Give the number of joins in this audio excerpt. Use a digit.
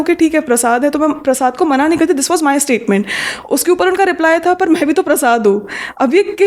0